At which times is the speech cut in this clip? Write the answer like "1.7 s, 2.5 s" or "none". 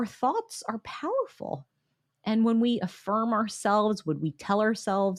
none